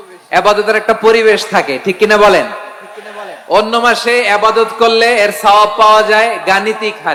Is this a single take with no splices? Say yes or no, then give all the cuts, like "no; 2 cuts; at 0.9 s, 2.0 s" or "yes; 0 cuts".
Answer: yes; 0 cuts